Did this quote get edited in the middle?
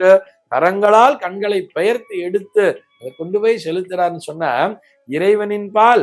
no; 0 cuts

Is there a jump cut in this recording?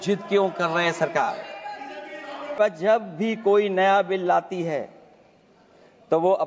yes; 1 cut; at 2.5 s

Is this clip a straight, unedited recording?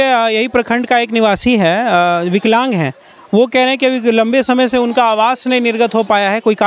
yes; 0 cuts

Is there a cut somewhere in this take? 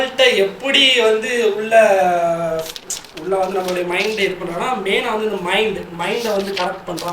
no; 0 cuts

